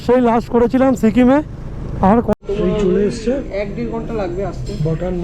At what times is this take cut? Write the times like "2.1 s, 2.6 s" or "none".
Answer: 2.3 s